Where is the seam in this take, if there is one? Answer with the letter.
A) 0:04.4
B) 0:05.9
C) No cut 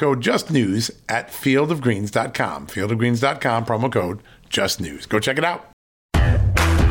B